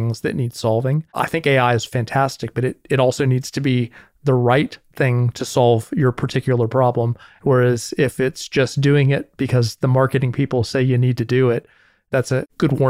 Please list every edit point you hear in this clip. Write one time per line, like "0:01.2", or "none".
0:01.1
0:07.2